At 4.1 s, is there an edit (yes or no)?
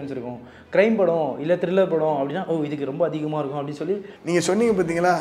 yes